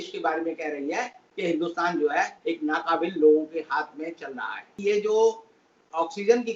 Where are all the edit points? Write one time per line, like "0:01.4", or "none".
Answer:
0:04.7